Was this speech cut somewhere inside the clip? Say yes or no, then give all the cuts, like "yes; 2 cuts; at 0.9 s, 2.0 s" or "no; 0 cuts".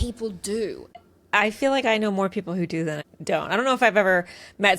yes; 2 cuts; at 0.9 s, 3.1 s